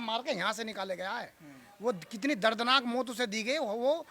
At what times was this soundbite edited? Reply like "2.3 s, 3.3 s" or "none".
none